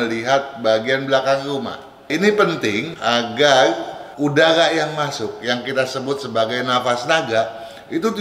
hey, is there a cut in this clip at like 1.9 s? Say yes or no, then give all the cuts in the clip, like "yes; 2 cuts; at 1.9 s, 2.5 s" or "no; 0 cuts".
yes; 1 cut; at 1.9 s